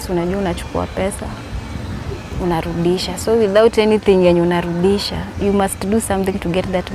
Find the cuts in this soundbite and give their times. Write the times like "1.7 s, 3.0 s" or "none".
none